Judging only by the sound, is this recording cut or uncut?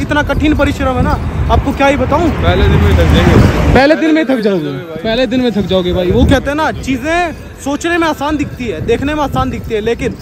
uncut